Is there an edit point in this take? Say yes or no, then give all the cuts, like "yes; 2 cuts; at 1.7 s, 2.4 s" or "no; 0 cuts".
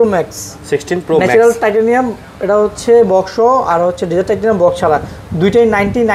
no; 0 cuts